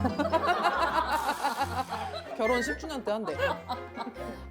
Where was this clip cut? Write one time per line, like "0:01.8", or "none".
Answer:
0:02.3